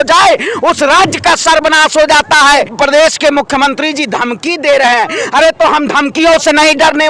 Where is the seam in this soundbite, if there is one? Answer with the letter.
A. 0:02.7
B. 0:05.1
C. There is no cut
A